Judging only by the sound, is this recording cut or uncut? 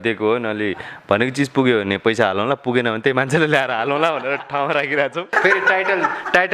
cut